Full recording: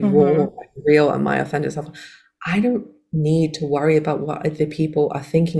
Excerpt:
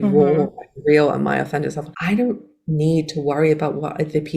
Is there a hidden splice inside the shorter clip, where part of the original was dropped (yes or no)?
yes